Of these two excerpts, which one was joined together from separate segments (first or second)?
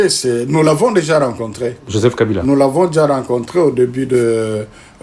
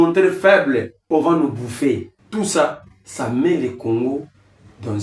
second